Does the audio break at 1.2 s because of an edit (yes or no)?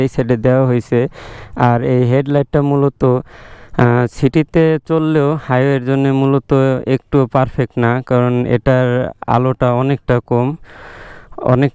no